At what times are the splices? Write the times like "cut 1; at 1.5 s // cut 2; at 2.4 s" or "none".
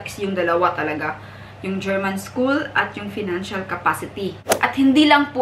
cut 1; at 4.5 s